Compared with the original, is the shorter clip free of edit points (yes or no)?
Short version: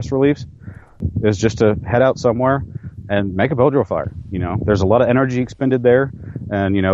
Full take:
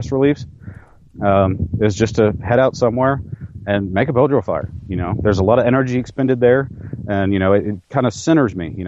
no